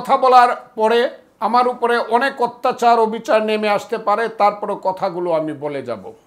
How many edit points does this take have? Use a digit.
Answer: 1